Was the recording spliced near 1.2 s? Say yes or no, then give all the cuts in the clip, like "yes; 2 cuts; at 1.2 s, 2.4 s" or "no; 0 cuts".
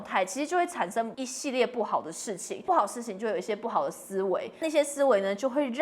yes; 3 cuts; at 1.2 s, 2.6 s, 4.6 s